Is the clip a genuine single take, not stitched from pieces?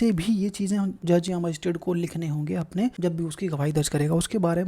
no; 2 cuts; at 1.0 s, 3.0 s

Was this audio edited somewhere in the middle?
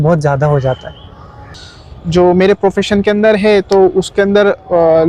yes; 1 cut; at 1.7 s

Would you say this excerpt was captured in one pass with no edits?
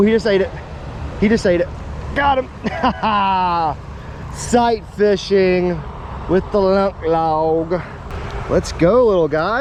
yes; 0 cuts

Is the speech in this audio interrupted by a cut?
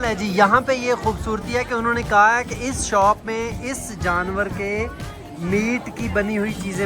no; 0 cuts

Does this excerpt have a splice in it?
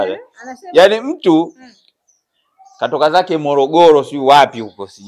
no; 0 cuts

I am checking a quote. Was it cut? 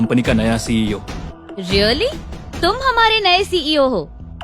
yes; 1 cut; at 1.3 s

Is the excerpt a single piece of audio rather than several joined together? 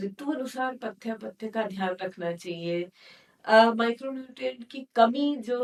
yes; 0 cuts

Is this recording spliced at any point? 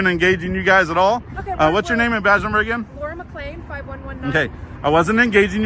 no; 0 cuts

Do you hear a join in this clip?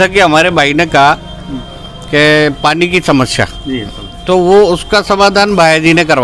no; 0 cuts

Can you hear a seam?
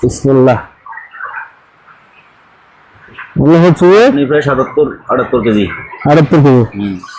no; 0 cuts

